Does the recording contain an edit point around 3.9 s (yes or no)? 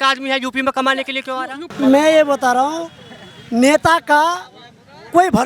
no